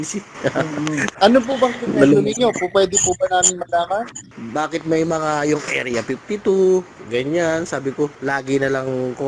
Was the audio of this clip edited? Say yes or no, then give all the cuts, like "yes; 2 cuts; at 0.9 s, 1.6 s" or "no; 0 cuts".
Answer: yes; 3 cuts; at 1.1 s, 4.2 s, 8.2 s